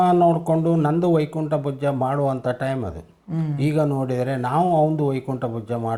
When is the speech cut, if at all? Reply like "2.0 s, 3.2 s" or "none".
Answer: none